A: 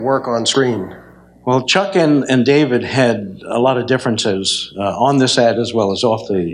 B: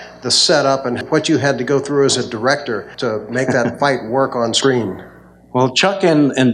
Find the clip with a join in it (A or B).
B